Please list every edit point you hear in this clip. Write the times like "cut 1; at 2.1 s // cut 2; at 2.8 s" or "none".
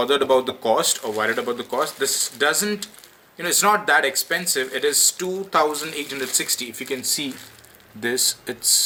none